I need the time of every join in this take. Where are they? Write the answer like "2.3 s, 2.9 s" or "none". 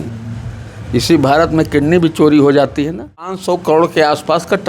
3.4 s